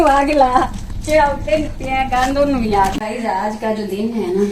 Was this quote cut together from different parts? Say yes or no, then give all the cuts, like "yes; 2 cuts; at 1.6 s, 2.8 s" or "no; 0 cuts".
yes; 1 cut; at 3.0 s